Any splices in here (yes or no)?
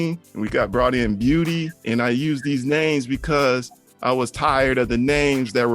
no